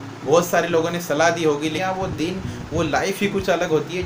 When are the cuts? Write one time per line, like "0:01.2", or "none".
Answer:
0:01.8